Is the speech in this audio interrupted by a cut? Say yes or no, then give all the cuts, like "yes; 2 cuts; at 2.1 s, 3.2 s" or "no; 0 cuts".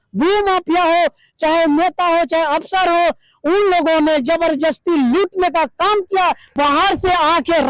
yes; 1 cut; at 6.5 s